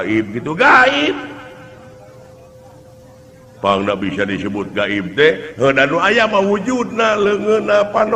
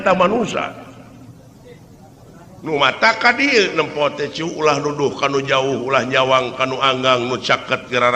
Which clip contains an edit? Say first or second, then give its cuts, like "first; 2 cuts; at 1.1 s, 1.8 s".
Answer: second; 1 cut; at 2.6 s